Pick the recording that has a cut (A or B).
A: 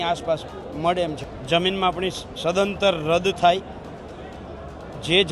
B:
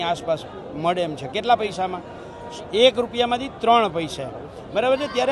A